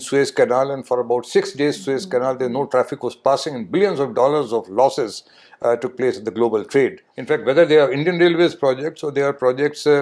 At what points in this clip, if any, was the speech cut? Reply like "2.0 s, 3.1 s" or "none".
7.1 s